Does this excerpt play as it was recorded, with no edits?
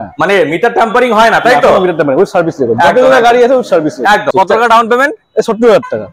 no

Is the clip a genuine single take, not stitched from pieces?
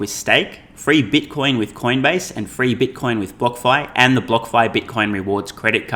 yes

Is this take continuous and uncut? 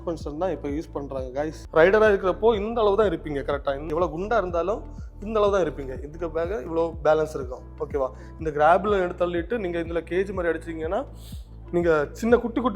no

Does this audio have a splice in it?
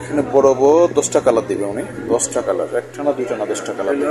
no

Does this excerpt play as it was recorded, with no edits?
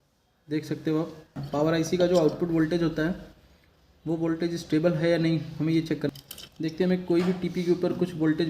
no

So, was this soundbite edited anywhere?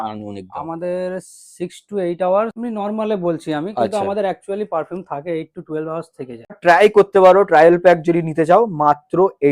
yes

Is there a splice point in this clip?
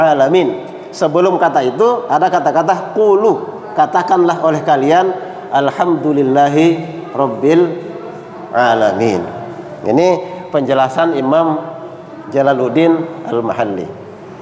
no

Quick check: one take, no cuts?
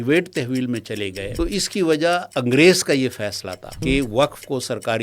no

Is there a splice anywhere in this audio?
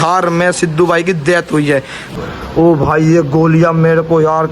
yes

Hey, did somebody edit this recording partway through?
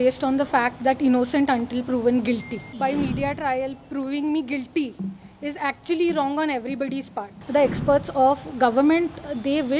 yes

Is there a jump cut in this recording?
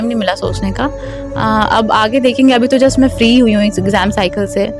no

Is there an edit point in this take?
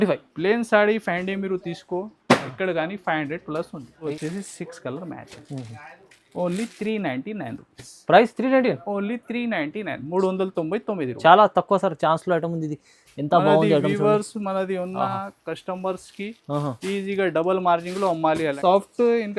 yes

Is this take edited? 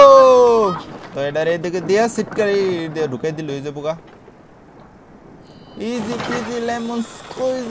yes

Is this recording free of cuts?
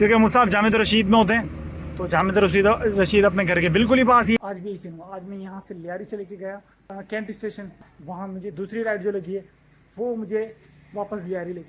no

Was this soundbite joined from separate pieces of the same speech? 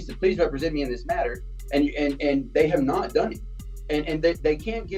no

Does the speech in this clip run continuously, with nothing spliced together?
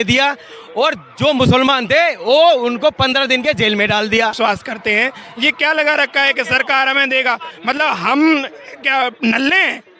no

